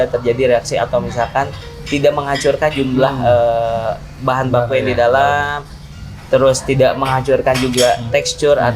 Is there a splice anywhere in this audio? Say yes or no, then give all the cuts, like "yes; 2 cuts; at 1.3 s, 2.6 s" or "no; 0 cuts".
no; 0 cuts